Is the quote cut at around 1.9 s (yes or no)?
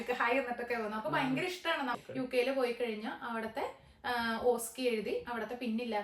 yes